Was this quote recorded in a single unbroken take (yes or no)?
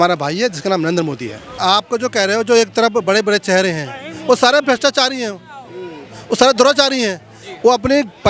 no